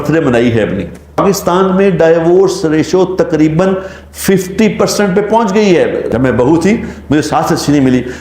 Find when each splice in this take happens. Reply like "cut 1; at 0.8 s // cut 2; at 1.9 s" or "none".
cut 1; at 1.2 s // cut 2; at 6.1 s